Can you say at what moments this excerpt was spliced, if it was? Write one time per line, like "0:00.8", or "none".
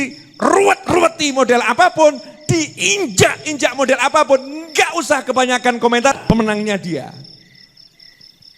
0:06.2